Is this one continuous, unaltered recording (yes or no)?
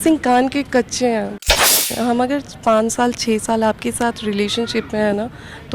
no